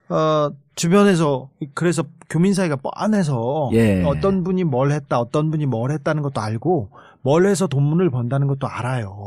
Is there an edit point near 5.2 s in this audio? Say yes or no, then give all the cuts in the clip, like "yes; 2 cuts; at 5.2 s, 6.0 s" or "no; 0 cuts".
yes; 1 cut; at 5.2 s